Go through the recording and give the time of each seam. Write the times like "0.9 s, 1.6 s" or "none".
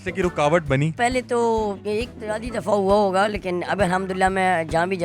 0.9 s